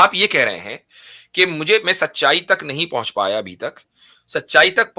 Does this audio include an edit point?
no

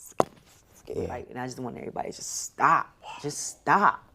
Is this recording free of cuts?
no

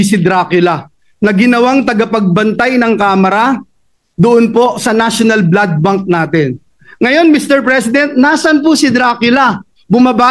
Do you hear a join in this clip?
no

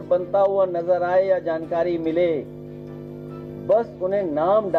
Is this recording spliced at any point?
no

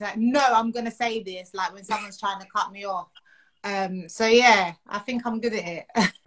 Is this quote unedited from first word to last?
yes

